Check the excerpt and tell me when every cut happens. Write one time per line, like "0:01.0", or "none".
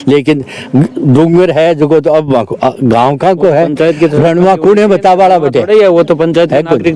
none